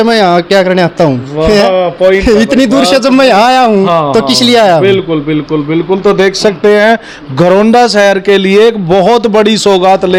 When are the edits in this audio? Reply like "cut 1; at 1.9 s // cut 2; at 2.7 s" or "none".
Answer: none